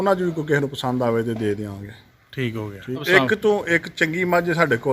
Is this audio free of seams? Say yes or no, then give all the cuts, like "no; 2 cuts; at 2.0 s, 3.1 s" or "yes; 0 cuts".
no; 1 cut; at 3.0 s